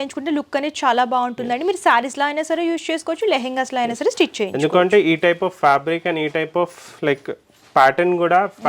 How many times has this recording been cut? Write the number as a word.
zero